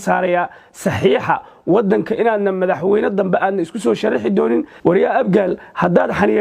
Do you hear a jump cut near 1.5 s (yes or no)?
no